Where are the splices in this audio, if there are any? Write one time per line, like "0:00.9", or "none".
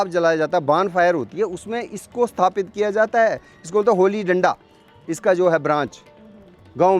none